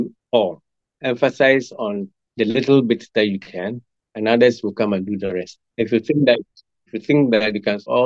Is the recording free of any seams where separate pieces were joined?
no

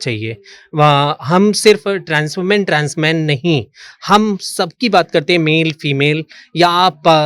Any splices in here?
no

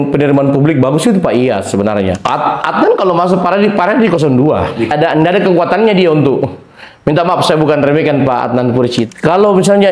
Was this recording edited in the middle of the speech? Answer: yes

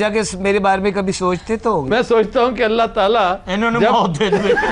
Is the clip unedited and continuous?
yes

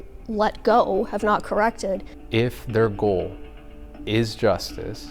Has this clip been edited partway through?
yes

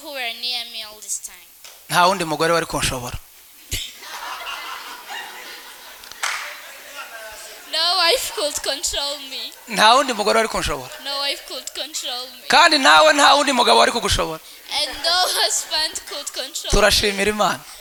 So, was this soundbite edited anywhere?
no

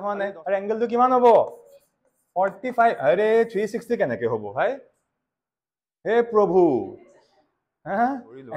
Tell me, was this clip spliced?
no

